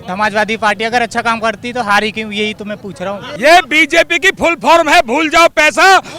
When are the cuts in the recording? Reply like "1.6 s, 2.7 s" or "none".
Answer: 3.4 s